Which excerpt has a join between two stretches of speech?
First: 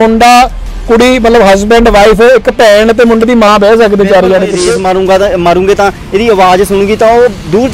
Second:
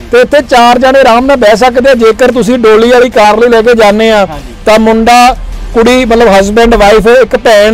first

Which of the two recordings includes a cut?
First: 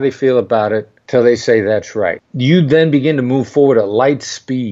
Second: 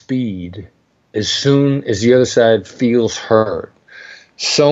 first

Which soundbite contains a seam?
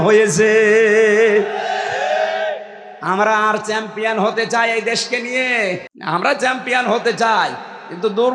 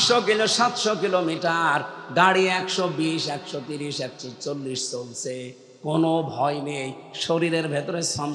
first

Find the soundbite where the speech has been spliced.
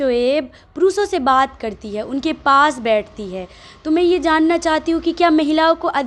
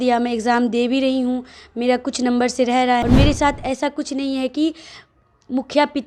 second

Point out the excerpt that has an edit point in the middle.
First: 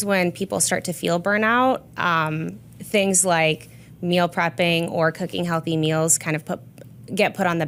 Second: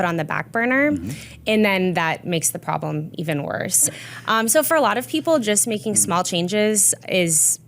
second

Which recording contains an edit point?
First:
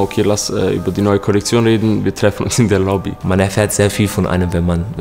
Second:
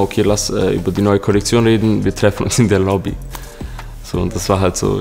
first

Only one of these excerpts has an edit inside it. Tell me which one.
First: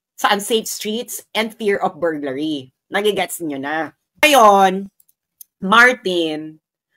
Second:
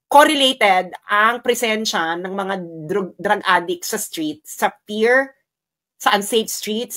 first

